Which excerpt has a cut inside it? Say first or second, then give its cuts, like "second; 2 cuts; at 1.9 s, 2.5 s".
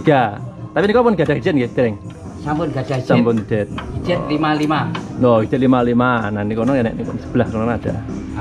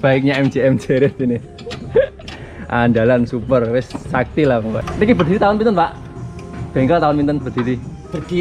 second; 1 cut; at 4.8 s